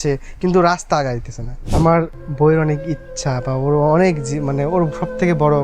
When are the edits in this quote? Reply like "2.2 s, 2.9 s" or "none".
1.7 s